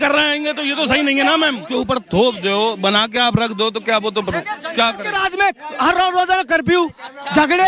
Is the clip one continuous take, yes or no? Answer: no